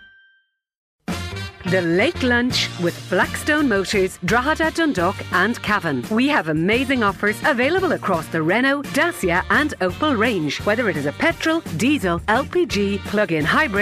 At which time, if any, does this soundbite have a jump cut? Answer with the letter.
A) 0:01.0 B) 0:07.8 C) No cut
A